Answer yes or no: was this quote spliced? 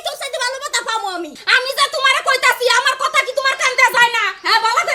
yes